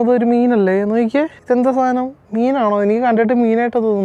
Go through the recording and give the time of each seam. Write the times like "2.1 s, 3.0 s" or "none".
none